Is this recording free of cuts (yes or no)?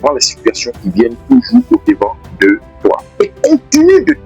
no